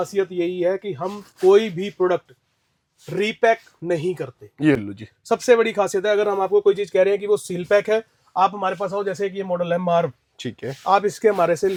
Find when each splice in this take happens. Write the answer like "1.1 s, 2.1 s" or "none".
none